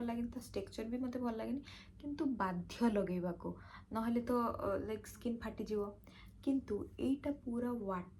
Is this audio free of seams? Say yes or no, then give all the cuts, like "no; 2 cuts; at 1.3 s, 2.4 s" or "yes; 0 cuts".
yes; 0 cuts